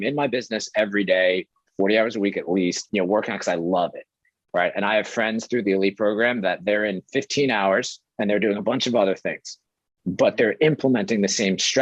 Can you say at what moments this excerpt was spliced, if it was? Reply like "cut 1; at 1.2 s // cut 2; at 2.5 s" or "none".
cut 1; at 2.8 s

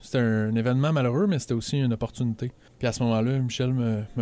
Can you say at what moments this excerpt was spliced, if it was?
cut 1; at 2.5 s

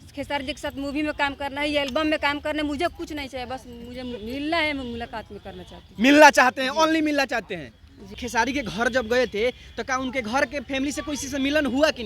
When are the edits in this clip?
cut 1; at 8.2 s

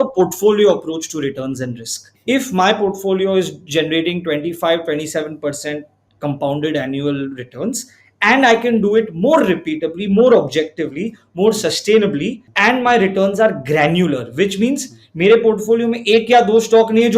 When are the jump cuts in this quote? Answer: none

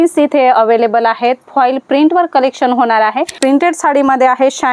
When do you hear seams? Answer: cut 1; at 3.3 s

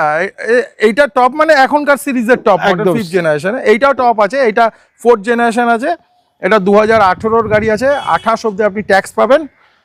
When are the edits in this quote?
none

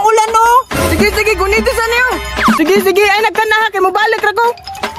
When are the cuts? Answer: cut 1; at 2.6 s

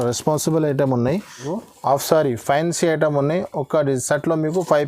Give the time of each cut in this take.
cut 1; at 1.5 s

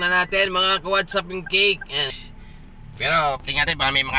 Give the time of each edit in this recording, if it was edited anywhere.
cut 1; at 2.2 s

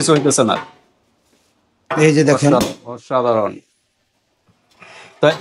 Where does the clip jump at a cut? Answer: none

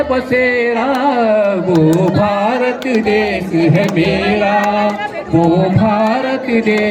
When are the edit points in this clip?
none

